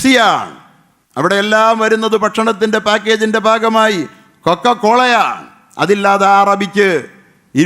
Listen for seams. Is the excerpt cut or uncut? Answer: uncut